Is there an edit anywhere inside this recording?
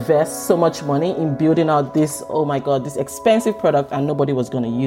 no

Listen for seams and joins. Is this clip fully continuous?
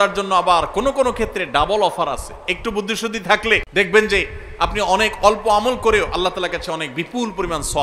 no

